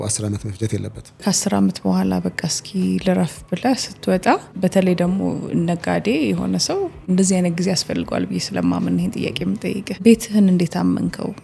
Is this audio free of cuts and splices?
no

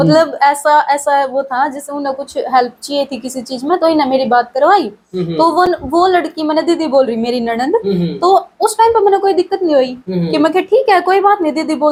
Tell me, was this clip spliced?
no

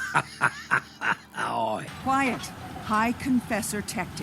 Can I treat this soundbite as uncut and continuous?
no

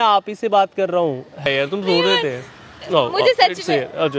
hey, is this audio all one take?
no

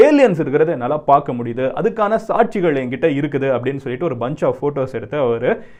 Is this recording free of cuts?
yes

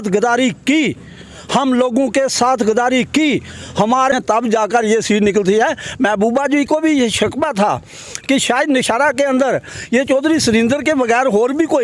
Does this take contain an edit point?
yes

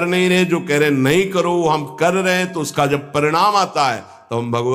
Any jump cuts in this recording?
no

